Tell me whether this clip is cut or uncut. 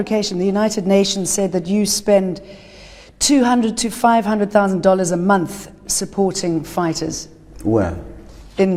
uncut